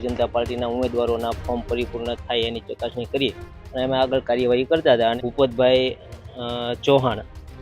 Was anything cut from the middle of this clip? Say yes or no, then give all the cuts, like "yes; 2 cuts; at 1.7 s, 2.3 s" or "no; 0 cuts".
yes; 1 cut; at 5.2 s